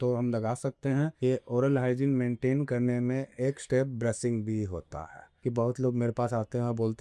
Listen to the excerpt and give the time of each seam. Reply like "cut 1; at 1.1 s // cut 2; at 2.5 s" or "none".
cut 1; at 1.2 s // cut 2; at 5.4 s